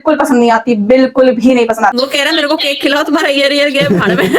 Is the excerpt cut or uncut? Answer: cut